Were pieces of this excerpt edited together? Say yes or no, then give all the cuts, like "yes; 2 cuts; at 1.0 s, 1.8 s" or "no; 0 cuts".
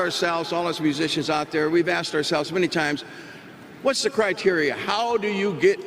no; 0 cuts